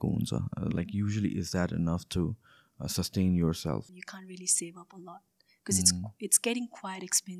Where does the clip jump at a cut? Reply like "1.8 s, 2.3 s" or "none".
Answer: 4.0 s